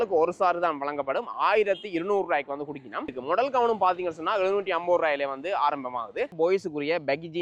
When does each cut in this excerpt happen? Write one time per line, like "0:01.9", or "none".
0:03.1
0:06.3